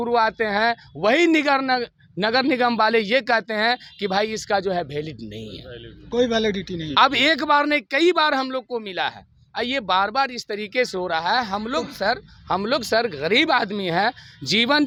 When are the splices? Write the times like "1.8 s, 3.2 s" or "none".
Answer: none